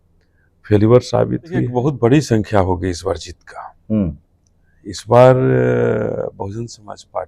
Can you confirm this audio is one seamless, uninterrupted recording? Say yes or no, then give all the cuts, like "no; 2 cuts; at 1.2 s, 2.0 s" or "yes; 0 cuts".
no; 1 cut; at 1.7 s